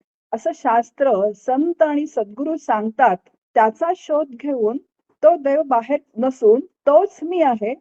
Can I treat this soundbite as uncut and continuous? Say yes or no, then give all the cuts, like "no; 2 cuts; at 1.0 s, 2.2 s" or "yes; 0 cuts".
no; 3 cuts; at 3.4 s, 6.1 s, 6.7 s